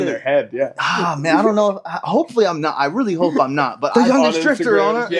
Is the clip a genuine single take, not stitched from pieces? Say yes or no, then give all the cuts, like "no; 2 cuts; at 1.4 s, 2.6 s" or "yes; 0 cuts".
no; 1 cut; at 3.9 s